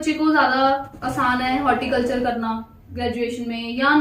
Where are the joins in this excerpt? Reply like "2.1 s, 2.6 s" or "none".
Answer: none